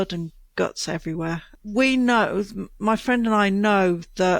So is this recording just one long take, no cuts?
no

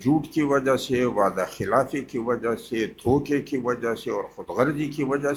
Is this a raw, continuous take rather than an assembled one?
yes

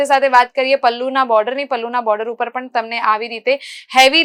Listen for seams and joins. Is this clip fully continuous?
yes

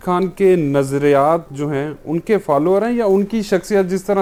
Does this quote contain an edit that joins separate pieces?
no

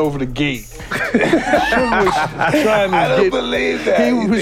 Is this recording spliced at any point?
no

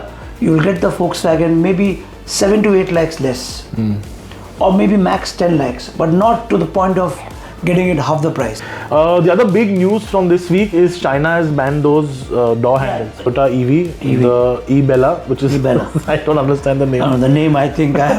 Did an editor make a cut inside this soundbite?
yes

